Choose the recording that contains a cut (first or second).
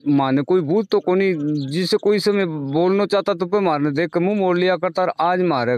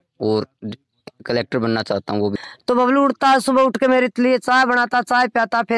second